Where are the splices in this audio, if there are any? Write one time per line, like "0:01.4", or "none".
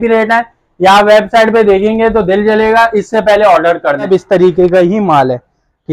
0:04.0